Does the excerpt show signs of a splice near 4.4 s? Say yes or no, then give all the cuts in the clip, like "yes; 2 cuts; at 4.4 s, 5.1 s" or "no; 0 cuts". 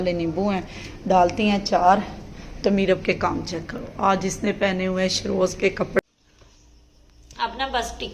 no; 1 cut; at 6.0 s